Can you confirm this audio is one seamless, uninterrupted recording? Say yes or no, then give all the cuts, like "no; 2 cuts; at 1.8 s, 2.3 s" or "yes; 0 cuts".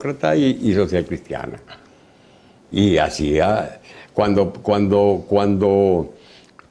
yes; 0 cuts